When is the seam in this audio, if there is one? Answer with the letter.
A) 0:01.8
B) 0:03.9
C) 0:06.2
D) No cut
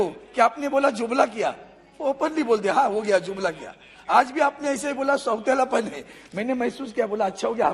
D